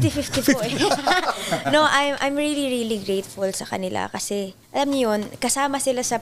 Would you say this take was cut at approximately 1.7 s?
no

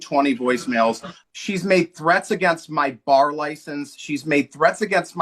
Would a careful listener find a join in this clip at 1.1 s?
yes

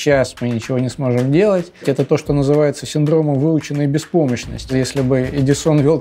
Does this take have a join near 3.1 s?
no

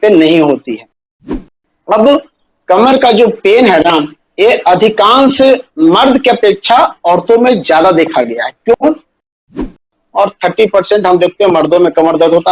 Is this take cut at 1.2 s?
yes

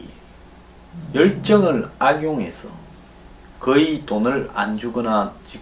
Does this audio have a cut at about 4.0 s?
no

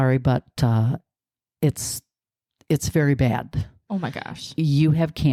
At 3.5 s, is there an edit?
no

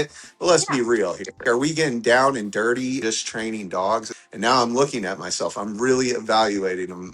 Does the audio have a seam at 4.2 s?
yes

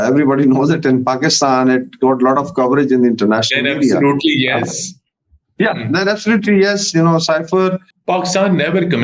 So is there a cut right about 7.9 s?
yes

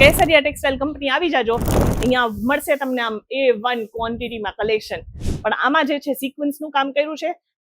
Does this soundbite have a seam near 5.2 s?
yes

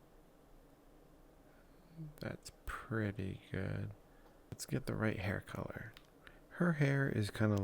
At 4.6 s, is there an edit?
yes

